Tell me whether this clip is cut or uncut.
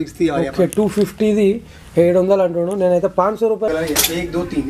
cut